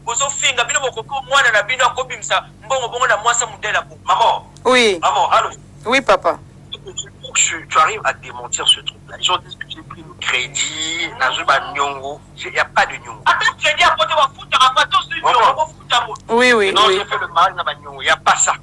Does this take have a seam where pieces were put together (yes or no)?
yes